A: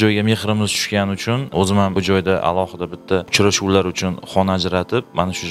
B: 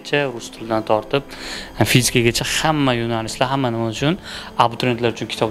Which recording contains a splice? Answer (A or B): A